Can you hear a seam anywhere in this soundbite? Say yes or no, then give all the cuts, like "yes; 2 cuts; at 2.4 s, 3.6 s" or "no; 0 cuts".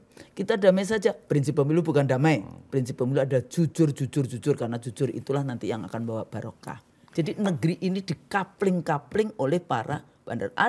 yes; 1 cut; at 6.7 s